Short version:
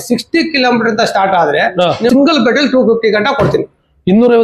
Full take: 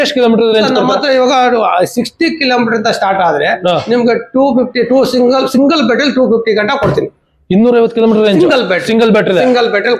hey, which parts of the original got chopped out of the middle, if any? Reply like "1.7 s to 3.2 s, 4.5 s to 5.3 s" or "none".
4.0 s to 5.5 s